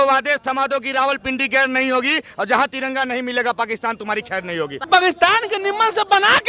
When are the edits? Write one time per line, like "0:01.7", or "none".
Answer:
0:04.8